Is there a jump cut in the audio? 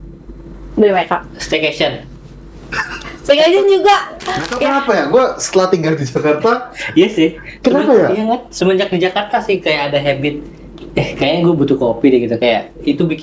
yes; 1 cut; at 4.6 s

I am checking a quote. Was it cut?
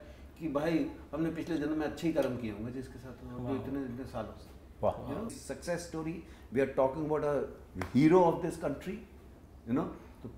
no; 0 cuts

